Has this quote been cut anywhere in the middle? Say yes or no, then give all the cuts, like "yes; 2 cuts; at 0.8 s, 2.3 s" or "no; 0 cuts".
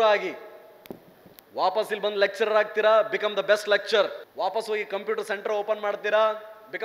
yes; 1 cut; at 4.2 s